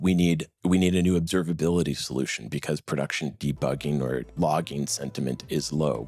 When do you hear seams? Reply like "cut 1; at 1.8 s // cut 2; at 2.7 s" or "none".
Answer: cut 1; at 4.3 s